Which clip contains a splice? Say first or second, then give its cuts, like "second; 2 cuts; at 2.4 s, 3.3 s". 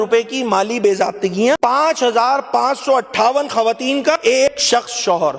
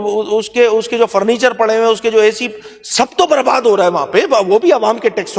first; 2 cuts; at 1.6 s, 4.4 s